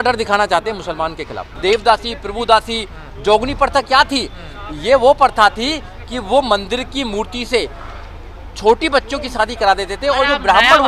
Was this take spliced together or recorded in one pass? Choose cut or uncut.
cut